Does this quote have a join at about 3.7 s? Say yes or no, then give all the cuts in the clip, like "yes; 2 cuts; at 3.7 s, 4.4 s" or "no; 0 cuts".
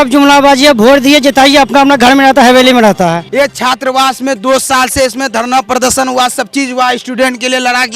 yes; 1 cut; at 3.7 s